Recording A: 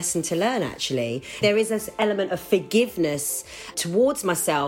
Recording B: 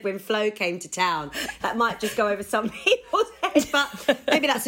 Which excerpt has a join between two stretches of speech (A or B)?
A